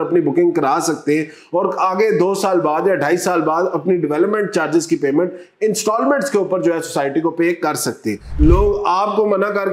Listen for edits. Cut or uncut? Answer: cut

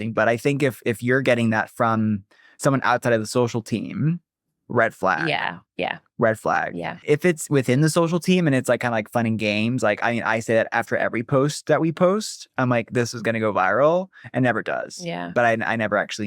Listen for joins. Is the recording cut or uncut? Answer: cut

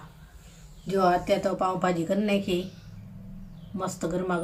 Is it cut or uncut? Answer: uncut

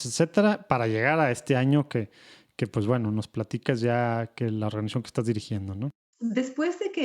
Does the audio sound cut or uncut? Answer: cut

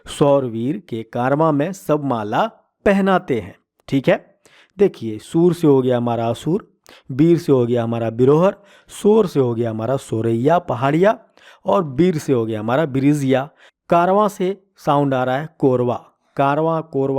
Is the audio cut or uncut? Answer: uncut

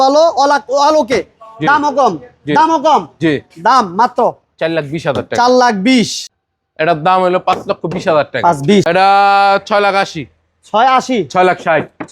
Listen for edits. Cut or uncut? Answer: cut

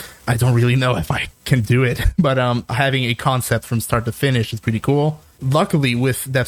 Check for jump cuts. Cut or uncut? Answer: cut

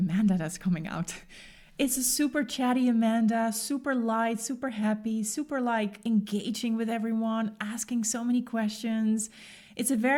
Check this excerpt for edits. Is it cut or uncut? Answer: uncut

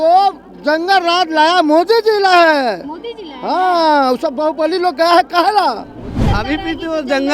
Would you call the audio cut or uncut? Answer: cut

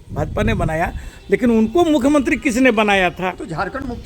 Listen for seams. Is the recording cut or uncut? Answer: uncut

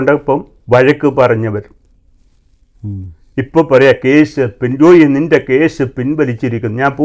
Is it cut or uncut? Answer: uncut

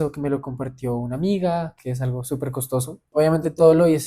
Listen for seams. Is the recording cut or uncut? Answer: cut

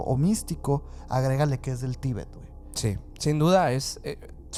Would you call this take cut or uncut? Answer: uncut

